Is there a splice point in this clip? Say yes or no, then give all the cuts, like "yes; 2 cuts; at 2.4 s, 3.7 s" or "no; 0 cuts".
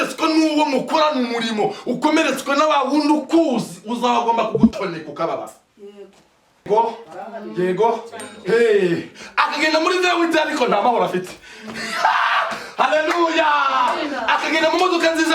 yes; 1 cut; at 6.6 s